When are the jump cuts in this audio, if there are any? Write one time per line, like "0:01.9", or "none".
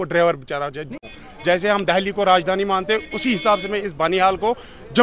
0:01.0